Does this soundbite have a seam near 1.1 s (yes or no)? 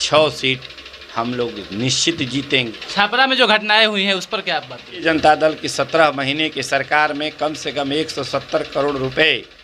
no